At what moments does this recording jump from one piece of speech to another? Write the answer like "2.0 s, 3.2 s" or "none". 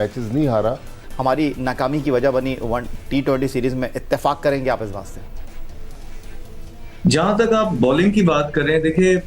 1.1 s